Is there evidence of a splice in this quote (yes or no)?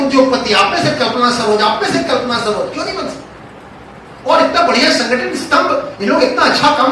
no